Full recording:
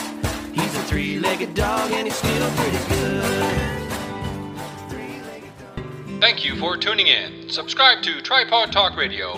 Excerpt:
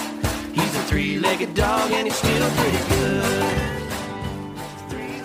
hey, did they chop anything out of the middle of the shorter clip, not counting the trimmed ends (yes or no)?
no